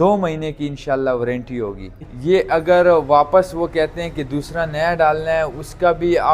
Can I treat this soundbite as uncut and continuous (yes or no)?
no